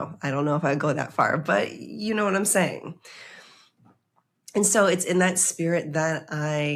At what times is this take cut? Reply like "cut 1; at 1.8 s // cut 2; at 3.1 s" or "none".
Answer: none

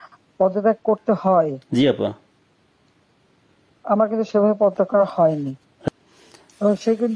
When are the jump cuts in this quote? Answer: cut 1; at 5.7 s

